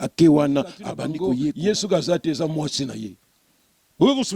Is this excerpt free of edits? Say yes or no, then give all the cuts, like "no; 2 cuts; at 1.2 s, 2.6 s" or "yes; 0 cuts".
no; 1 cut; at 1.2 s